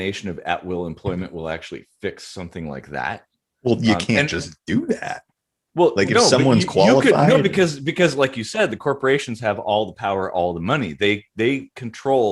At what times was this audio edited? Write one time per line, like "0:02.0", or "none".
none